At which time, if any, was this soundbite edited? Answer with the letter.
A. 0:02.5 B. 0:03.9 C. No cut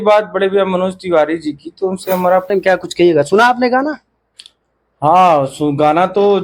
A